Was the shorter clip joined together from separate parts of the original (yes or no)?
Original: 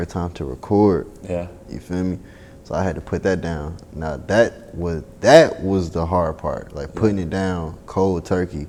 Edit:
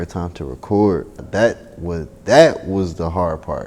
yes